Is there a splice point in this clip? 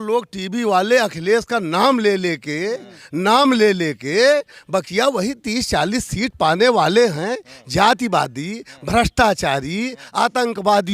no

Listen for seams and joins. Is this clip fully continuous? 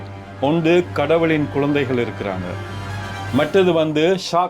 yes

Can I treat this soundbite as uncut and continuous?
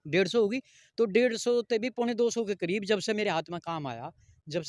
yes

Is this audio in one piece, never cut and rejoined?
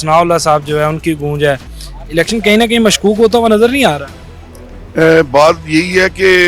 yes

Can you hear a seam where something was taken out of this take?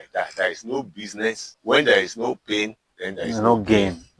yes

